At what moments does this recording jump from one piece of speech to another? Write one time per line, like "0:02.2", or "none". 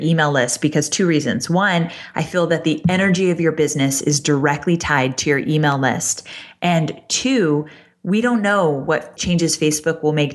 0:09.1